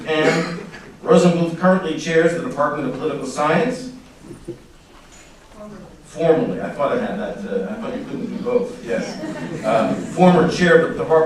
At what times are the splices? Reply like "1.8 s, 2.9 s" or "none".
3.2 s